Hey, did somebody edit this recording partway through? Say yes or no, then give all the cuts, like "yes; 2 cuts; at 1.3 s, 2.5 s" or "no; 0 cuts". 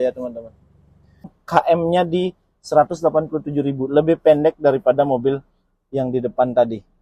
yes; 1 cut; at 1.3 s